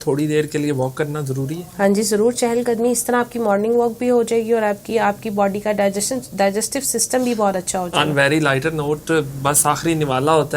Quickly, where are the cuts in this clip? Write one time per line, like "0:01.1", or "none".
none